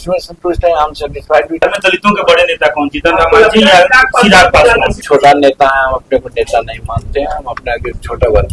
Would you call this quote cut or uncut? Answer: cut